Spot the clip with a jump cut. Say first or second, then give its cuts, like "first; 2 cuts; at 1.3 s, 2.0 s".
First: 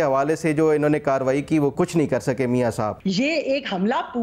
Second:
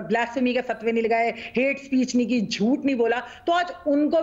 first; 2 cuts; at 1.7 s, 3.0 s